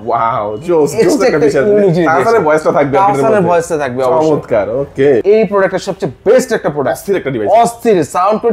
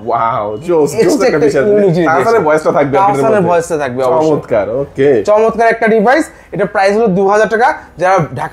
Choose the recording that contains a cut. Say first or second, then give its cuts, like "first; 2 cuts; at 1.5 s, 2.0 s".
first; 1 cut; at 5.2 s